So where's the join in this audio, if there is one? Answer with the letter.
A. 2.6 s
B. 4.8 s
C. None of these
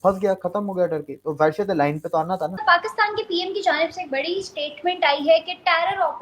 A